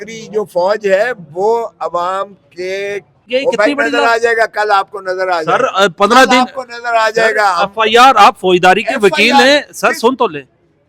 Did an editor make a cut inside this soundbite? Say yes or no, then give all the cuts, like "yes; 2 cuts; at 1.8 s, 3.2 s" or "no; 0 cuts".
yes; 1 cut; at 3.2 s